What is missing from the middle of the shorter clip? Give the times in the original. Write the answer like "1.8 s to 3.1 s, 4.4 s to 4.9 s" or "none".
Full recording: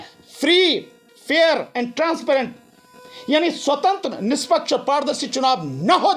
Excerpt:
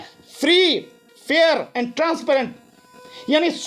none